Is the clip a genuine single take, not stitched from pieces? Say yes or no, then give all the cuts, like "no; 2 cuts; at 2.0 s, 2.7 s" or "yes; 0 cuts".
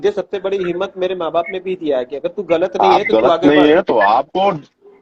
yes; 0 cuts